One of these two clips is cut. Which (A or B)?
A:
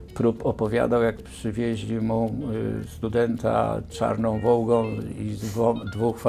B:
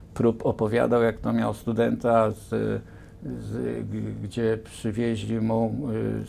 A